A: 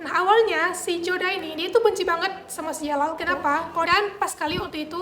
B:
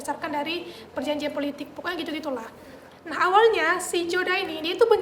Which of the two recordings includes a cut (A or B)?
A